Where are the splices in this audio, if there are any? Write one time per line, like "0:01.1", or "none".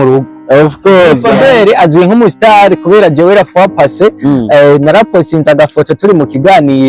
0:01.3